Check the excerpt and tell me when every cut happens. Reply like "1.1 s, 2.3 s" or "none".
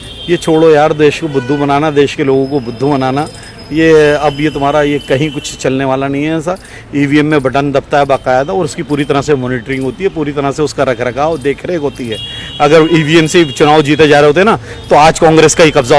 none